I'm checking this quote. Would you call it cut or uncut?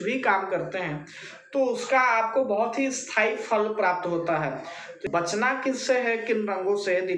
cut